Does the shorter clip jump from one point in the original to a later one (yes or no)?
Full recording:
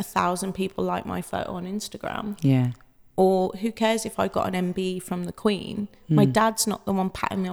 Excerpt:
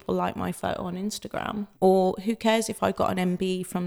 yes